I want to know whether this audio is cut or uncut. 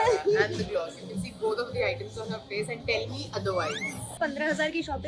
cut